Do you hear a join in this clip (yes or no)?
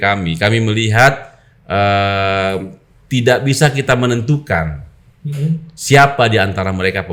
no